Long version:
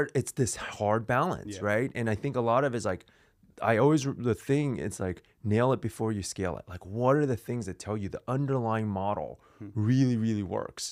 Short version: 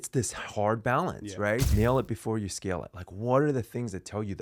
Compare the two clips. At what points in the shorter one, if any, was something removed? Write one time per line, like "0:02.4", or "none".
0:01.7